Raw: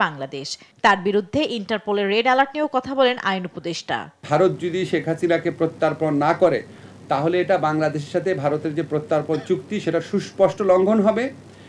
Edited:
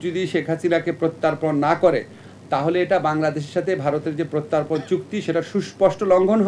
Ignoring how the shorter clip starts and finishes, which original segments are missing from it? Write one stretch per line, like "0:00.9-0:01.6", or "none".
none

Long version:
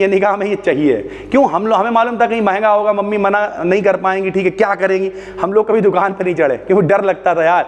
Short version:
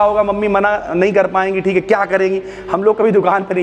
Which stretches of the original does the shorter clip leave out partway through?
none

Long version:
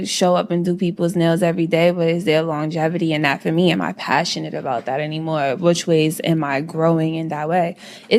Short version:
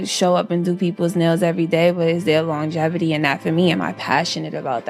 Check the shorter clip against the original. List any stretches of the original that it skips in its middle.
none

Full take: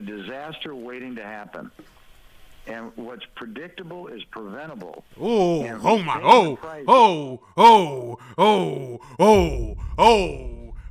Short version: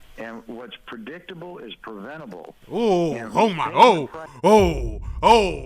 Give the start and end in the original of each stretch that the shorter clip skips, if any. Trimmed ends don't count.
0:06.7-0:08.9

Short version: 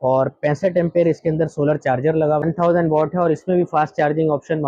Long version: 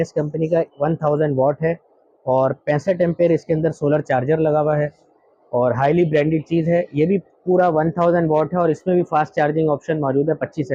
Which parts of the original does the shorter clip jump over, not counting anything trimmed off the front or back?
0:04.7-0:07.8

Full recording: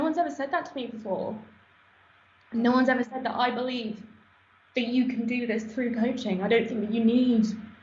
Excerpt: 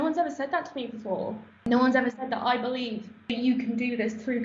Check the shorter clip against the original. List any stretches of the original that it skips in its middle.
0:01.7-0:02.6
0:04.1-0:04.7

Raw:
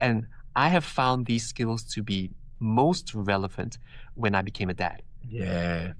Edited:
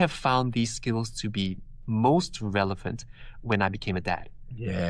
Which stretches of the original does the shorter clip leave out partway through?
none

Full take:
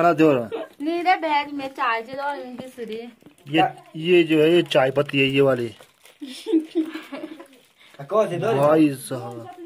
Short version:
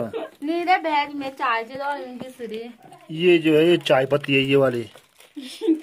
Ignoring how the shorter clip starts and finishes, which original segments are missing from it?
0:03.4-0:03.8

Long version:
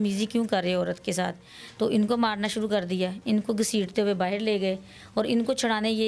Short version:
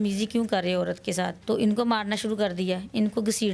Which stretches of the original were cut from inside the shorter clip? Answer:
0:01.4-0:01.7

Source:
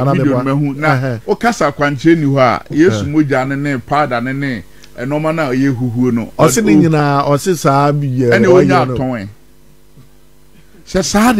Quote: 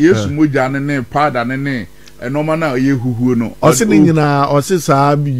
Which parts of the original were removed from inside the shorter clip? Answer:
none

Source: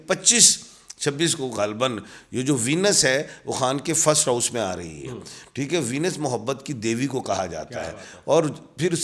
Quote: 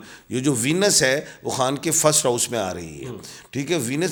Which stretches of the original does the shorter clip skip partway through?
none

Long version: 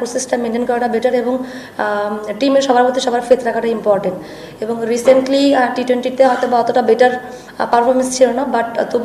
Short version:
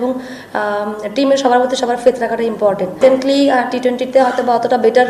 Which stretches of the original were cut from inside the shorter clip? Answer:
0:04.2-0:05.0

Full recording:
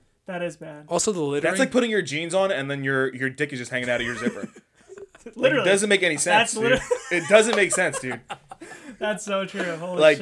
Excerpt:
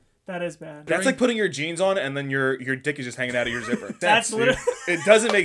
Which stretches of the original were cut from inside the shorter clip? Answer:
0:00.9-0:01.4
0:04.5-0:06.2

